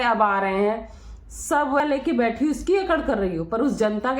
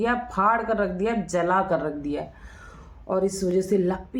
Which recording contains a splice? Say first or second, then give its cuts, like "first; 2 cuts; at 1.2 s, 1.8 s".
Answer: first; 1 cut; at 1.8 s